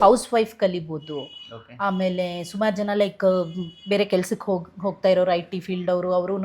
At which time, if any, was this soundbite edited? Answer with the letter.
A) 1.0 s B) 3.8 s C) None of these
C